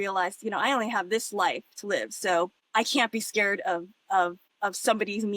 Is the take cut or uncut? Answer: cut